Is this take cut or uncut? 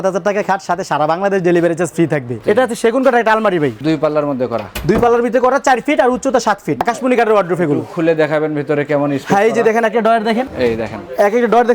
cut